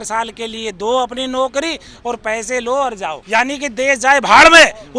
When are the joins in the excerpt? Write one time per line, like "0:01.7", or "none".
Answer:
0:03.2